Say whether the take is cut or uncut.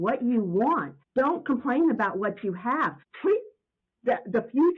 cut